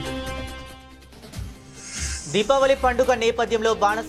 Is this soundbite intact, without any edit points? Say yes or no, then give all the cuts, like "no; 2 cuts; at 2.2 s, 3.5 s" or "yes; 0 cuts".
no; 1 cut; at 2.1 s